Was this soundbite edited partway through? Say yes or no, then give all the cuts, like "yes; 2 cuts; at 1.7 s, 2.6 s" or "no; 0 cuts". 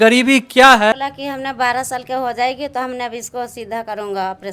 yes; 1 cut; at 1.0 s